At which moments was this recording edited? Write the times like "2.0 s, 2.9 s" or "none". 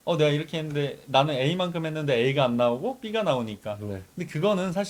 none